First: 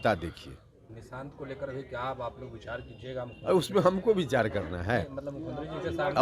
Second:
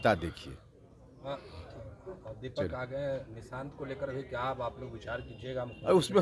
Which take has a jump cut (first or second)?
first